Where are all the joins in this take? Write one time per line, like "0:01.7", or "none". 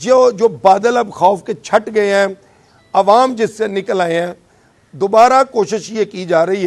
none